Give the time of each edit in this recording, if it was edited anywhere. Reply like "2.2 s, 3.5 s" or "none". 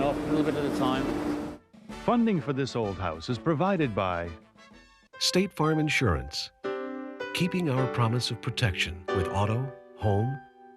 1.5 s